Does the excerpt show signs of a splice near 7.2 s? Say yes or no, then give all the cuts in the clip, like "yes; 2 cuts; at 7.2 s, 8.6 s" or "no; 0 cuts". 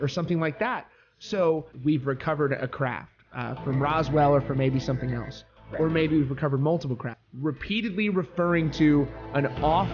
yes; 2 cuts; at 1.7 s, 7.2 s